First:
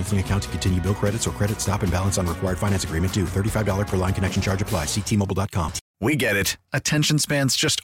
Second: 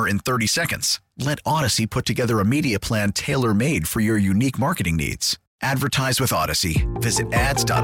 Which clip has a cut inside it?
first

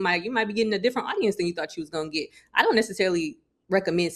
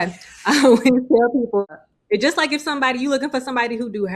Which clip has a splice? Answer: second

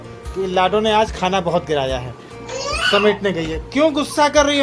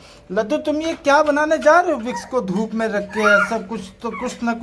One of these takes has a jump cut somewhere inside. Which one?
first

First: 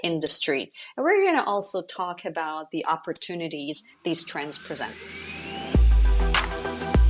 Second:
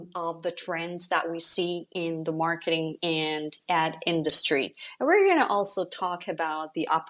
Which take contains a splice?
first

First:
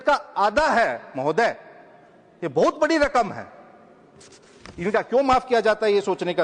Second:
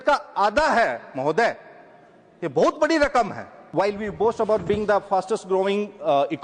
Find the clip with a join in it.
second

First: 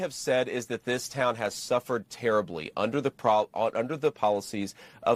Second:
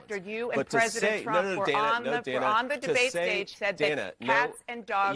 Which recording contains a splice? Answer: second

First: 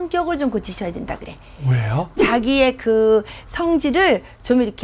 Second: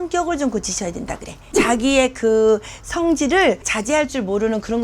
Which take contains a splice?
second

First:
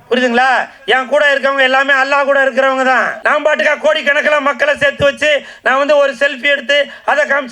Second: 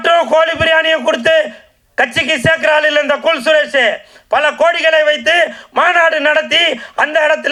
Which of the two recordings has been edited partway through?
first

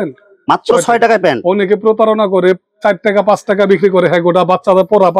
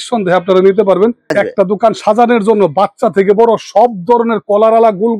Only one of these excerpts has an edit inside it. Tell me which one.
second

